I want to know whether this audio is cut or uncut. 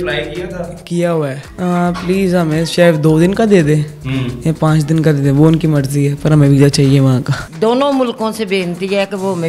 cut